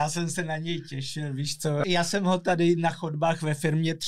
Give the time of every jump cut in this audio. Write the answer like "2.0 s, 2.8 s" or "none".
1.8 s